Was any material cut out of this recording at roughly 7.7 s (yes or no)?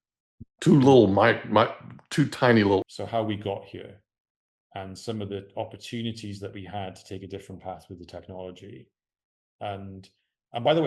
no